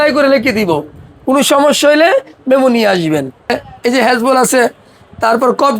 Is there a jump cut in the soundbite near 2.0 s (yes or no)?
no